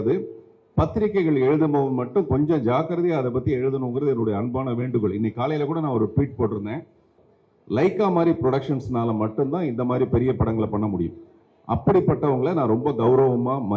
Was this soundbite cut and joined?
yes; 1 cut; at 7.1 s

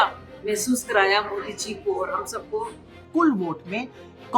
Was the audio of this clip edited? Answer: yes; 1 cut; at 2.9 s

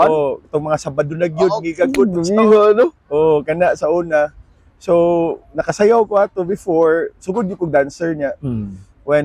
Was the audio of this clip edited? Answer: no; 0 cuts

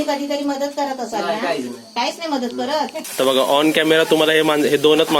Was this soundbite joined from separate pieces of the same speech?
yes; 1 cut; at 3.0 s

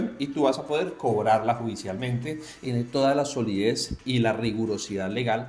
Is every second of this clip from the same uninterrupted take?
no; 1 cut; at 2.6 s

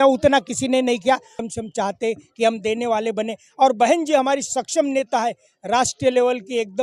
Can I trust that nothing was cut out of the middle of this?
no; 1 cut; at 1.4 s

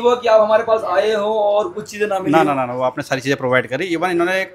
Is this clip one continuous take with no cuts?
yes; 0 cuts

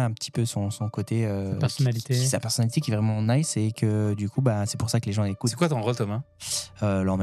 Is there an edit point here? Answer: no; 0 cuts

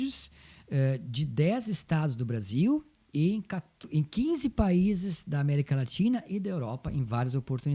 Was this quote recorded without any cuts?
yes; 0 cuts

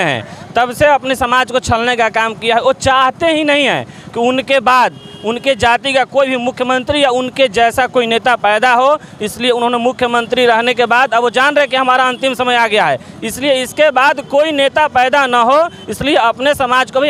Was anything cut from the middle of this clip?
no; 0 cuts

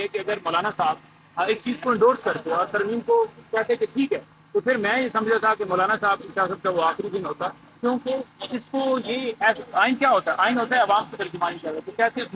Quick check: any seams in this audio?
no; 0 cuts

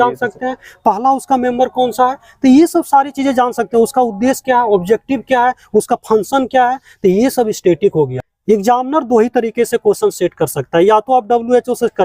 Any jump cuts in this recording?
yes; 1 cut; at 8.3 s

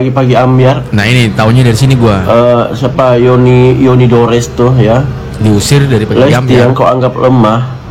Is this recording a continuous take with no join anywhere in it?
yes; 0 cuts

